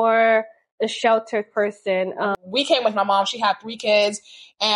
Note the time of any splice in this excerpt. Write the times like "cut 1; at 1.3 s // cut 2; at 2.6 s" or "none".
cut 1; at 2.4 s

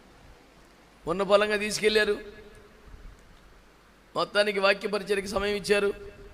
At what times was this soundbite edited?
cut 1; at 0.9 s

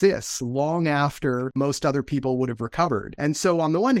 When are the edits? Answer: cut 1; at 1.5 s // cut 2; at 3.1 s

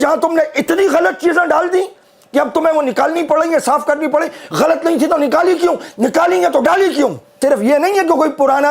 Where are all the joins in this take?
cut 1; at 7.4 s

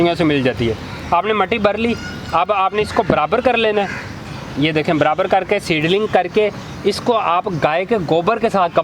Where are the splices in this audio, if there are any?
none

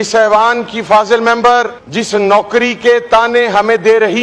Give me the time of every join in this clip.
cut 1; at 1.8 s

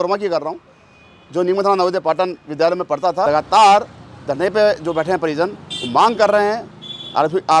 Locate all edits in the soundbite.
cut 1; at 3.2 s

